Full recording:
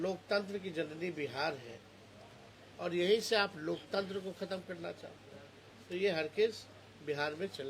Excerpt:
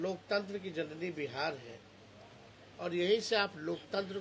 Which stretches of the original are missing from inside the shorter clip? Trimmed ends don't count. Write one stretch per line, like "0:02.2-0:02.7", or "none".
none